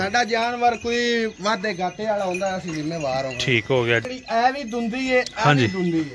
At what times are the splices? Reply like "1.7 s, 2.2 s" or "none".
4.1 s